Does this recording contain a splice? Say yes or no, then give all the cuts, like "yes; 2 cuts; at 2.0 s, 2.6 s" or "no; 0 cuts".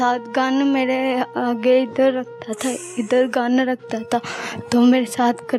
no; 0 cuts